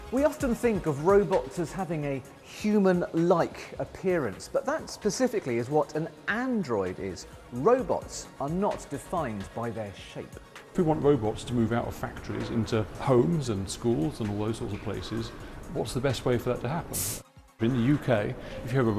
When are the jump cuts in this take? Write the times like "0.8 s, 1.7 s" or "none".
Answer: 4.1 s